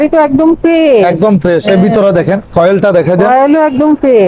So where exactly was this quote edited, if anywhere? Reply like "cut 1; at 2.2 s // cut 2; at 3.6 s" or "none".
none